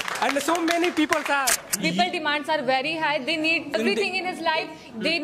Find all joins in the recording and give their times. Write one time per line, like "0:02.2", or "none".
0:01.6
0:03.7